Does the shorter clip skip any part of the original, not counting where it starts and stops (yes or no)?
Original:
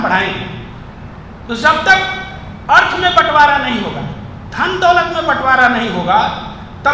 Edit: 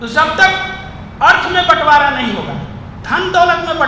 no